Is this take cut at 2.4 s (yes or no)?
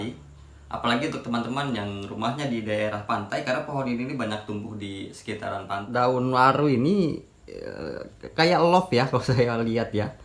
no